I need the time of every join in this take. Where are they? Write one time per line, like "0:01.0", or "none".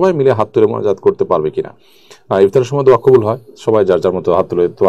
none